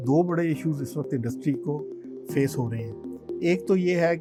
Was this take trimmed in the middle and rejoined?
no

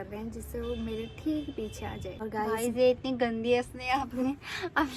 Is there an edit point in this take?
yes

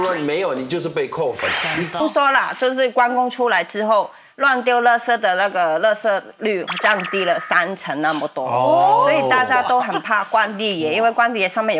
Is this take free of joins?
no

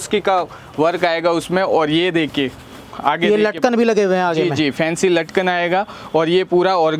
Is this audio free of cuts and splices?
yes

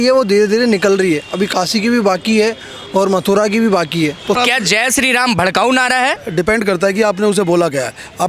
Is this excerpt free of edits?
no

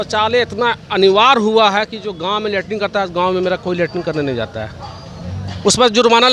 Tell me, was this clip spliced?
no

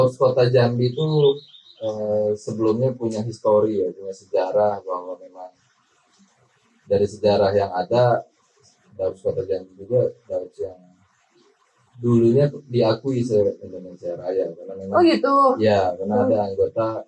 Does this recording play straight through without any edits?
yes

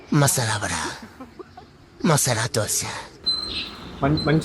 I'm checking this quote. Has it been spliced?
yes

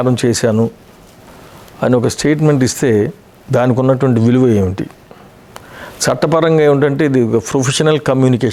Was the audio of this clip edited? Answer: no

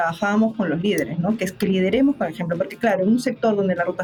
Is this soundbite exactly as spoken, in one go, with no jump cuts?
yes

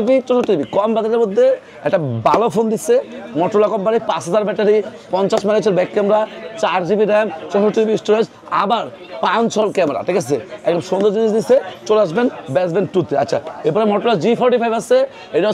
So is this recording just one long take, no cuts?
yes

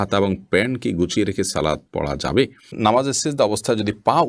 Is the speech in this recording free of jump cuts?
no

